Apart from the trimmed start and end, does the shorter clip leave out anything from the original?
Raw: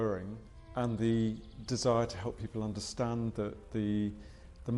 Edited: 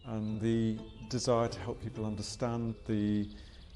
yes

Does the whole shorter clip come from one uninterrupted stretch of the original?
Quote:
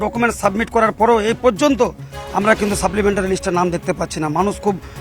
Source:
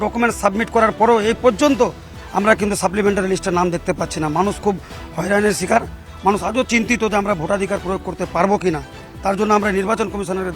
yes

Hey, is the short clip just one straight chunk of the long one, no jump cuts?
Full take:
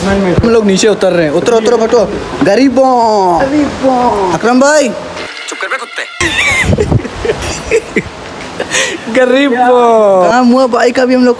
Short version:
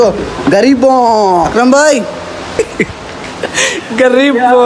no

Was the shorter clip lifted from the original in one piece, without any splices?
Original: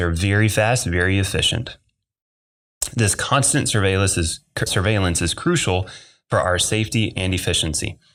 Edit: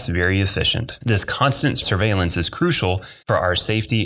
no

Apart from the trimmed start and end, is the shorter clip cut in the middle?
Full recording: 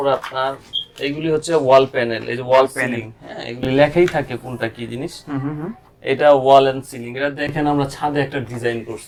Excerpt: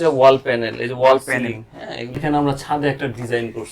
yes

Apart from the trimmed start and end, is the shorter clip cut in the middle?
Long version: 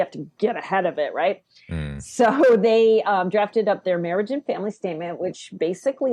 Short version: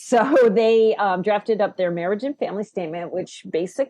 no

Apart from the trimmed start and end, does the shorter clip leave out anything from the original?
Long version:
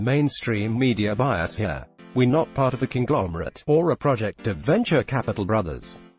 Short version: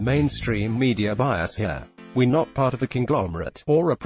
no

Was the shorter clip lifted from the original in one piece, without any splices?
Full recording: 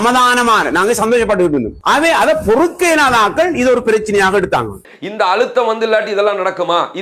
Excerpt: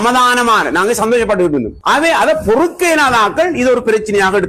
yes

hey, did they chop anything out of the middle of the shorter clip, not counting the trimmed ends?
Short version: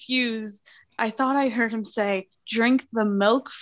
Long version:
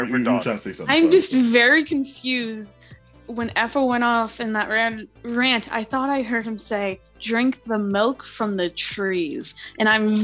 yes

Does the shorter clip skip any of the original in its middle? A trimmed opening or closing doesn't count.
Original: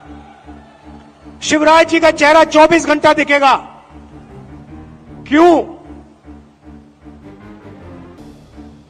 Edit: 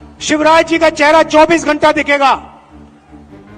yes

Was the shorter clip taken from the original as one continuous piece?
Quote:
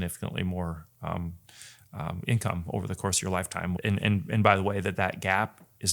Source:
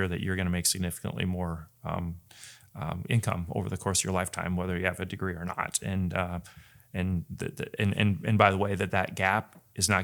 no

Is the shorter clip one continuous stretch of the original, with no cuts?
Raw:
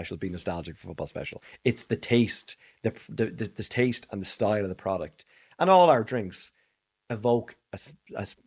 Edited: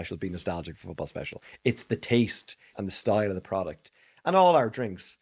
no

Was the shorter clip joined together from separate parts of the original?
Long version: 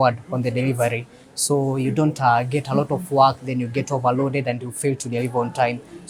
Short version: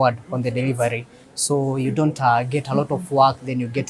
no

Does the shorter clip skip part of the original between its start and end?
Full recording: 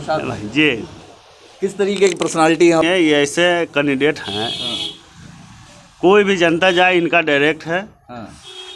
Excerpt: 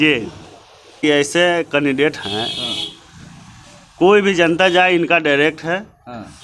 yes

